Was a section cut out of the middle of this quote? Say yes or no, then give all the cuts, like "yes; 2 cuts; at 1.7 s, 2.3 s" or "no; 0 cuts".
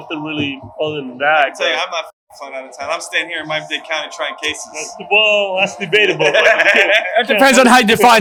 no; 0 cuts